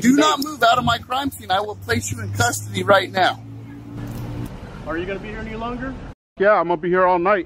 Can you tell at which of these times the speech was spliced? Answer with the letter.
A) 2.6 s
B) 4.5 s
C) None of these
B